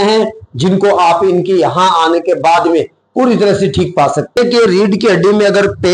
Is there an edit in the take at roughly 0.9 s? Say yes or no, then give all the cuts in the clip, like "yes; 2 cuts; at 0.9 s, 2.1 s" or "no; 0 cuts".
no; 1 cut; at 4.4 s